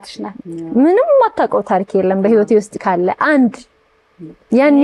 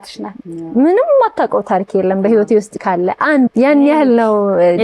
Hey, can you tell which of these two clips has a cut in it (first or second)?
second